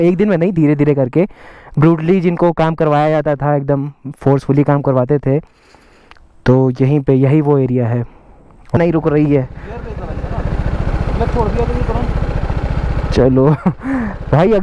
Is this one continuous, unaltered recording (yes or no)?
no